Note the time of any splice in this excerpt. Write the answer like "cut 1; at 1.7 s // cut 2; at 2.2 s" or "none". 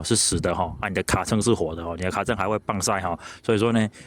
none